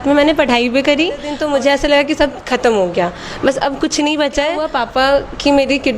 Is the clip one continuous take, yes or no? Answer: no